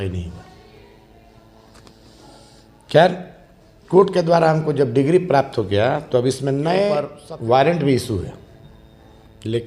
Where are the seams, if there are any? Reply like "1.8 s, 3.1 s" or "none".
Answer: 7.2 s